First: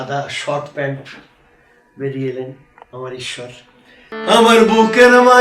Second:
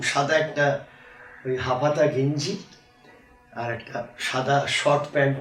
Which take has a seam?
first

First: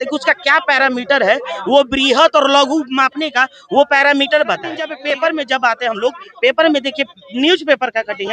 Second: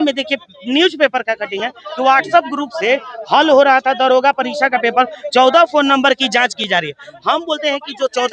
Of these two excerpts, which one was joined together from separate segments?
first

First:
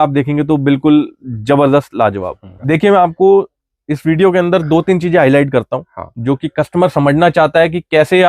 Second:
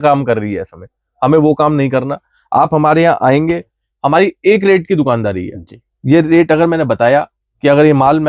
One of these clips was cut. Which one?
first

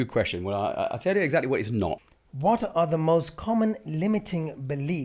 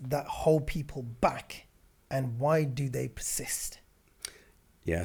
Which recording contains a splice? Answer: first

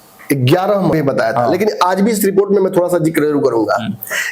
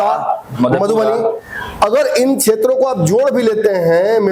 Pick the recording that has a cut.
first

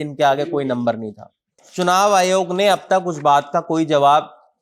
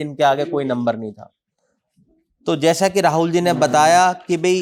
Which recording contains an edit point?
first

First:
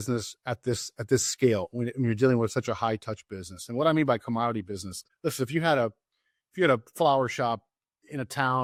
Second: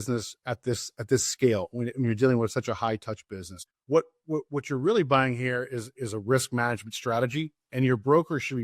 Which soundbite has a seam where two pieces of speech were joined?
second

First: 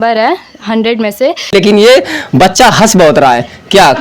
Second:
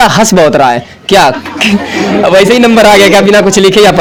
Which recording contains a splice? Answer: first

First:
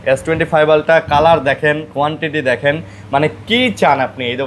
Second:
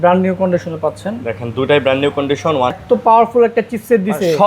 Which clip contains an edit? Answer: second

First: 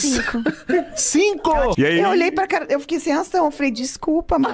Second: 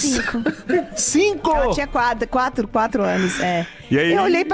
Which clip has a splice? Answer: first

